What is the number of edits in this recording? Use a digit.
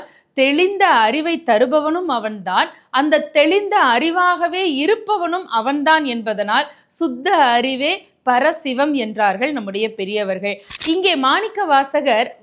1